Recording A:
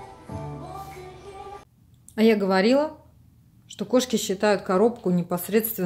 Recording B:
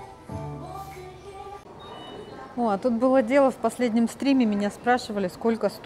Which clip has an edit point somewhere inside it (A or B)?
A